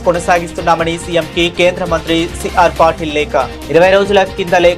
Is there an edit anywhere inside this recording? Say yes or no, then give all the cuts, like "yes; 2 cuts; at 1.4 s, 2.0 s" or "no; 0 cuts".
no; 0 cuts